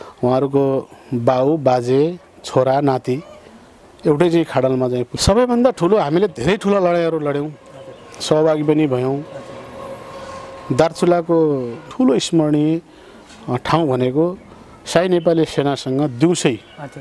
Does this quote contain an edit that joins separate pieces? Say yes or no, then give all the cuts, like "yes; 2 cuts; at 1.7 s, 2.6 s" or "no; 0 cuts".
yes; 2 cuts; at 5.1 s, 11.8 s